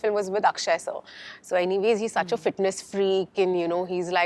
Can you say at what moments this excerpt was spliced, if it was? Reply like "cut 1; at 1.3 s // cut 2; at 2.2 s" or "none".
none